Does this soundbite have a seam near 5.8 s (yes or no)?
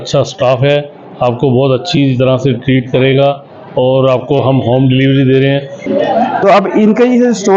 yes